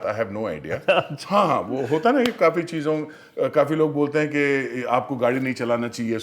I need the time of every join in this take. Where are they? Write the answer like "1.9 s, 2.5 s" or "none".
none

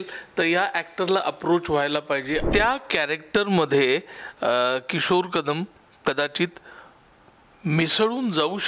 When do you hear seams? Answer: 2.5 s

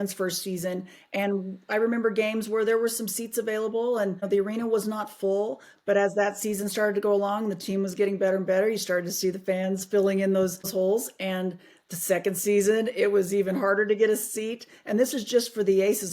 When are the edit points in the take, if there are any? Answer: 4.2 s, 10.7 s

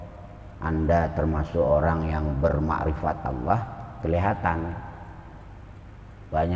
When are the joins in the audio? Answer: none

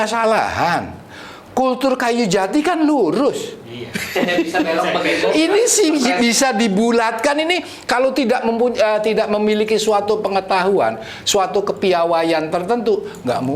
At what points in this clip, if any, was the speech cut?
none

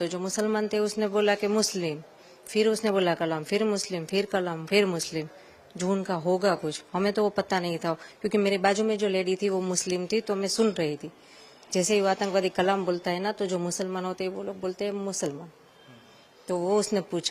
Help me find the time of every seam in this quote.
none

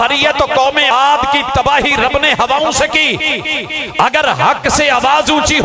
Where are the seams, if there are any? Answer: 0.9 s

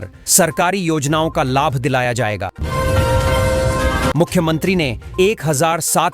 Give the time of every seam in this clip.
2.5 s, 4.1 s

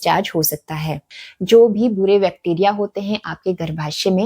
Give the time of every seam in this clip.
1.1 s

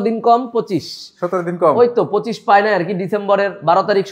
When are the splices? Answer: none

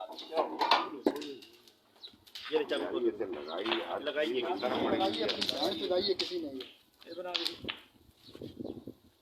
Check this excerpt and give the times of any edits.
1.1 s

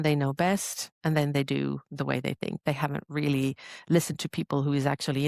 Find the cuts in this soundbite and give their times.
none

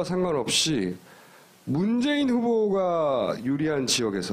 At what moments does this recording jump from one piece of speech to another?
2.4 s

